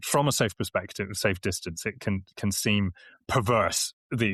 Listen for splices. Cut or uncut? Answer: uncut